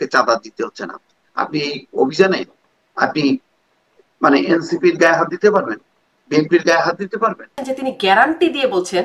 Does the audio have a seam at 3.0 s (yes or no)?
no